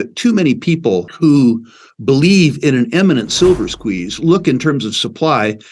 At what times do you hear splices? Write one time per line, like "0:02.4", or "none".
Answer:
0:01.1